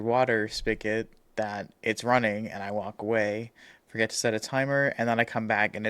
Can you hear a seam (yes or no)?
no